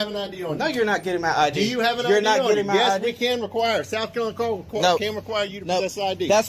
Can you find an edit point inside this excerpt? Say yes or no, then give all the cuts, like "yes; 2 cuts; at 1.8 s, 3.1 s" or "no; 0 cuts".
no; 0 cuts